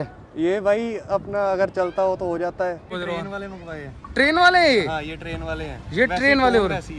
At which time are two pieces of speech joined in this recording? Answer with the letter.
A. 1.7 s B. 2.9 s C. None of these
B